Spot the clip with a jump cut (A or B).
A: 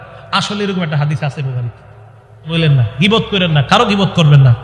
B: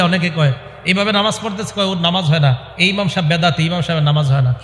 A